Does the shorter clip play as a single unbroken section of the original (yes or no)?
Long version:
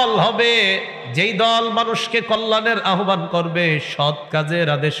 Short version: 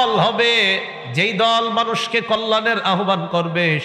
yes